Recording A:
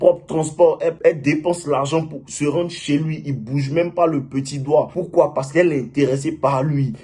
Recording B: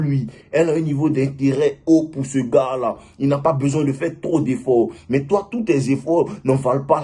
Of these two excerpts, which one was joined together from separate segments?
A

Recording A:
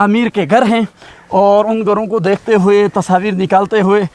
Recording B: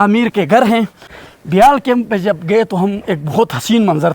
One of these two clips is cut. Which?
B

